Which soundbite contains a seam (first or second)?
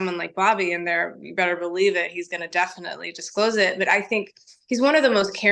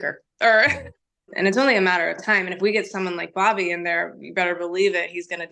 second